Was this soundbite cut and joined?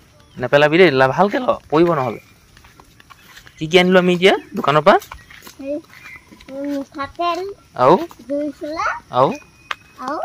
no; 0 cuts

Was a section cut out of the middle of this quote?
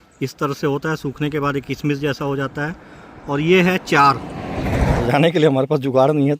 yes; 1 cut; at 5.0 s

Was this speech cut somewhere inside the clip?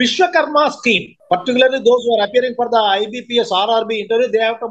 yes; 1 cut; at 1.1 s

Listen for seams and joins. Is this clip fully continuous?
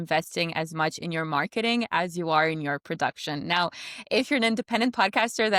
yes; 0 cuts

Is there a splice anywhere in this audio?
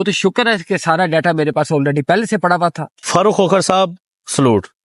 yes; 1 cut; at 2.9 s

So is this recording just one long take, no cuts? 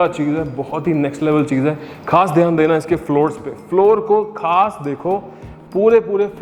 yes; 0 cuts

